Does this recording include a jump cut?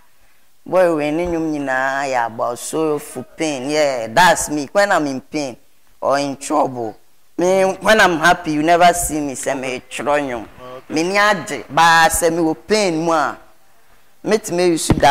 no; 0 cuts

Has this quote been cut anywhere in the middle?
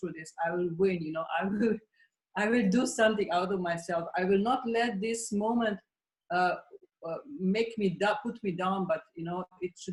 no; 0 cuts

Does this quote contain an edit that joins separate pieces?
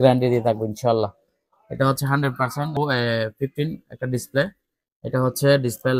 yes; 1 cut; at 2.7 s

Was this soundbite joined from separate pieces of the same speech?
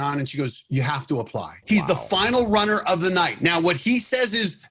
yes; 1 cut; at 1.5 s

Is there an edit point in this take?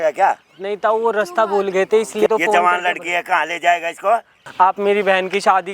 yes; 2 cuts; at 2.3 s, 4.4 s

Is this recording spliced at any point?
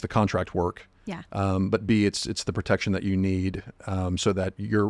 no; 0 cuts

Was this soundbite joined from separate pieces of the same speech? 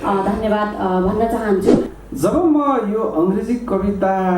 yes; 1 cut; at 1.9 s

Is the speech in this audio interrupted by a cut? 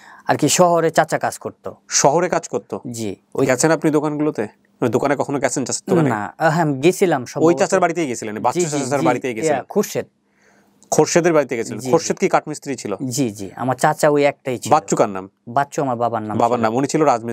no; 0 cuts

